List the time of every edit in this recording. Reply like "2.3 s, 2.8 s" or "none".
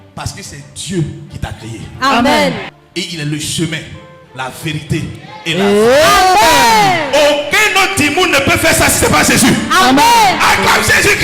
2.8 s